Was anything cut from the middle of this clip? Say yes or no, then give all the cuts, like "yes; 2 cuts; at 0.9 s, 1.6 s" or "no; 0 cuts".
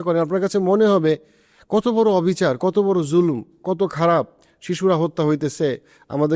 no; 0 cuts